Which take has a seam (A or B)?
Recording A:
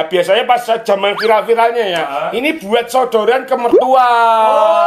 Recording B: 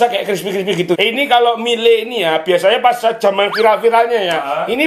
B